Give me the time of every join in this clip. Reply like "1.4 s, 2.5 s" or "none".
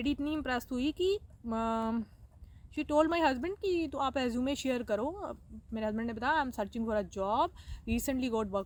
none